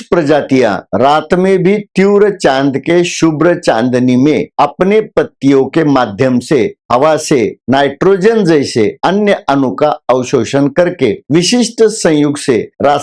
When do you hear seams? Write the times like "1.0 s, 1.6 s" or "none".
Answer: none

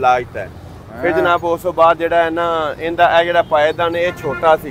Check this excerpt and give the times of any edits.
none

